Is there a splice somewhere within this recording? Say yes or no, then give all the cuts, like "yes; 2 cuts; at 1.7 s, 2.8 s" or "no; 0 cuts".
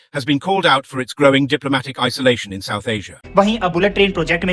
yes; 1 cut; at 3.2 s